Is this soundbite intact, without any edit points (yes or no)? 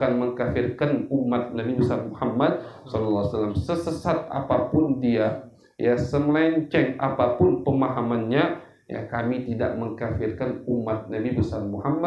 yes